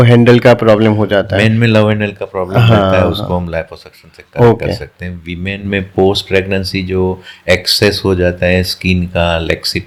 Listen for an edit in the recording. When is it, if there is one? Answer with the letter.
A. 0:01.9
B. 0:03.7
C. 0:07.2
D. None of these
D